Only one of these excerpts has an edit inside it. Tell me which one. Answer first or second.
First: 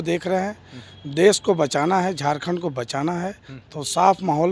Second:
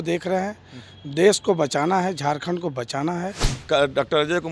second